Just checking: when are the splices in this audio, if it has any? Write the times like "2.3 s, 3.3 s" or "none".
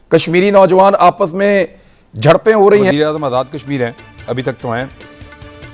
2.9 s